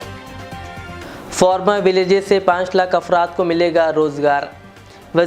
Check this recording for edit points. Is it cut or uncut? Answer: cut